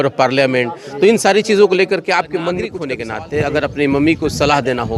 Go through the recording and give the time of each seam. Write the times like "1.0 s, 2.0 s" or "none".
2.8 s